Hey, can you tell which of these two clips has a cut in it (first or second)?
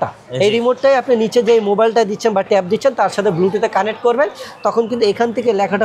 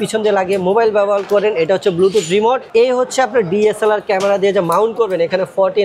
second